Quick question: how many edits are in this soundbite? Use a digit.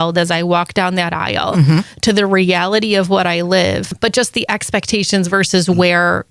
1